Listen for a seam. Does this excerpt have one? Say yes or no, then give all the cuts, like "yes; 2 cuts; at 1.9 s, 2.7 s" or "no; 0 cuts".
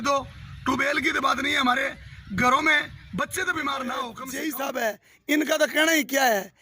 yes; 1 cut; at 4.2 s